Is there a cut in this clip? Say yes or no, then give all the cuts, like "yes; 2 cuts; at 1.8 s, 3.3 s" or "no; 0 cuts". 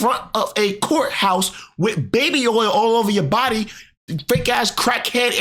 no; 0 cuts